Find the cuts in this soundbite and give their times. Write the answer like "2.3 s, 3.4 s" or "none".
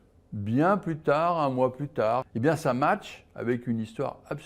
2.3 s